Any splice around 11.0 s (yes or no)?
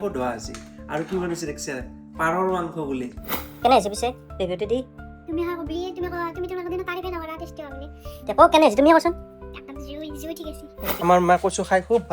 yes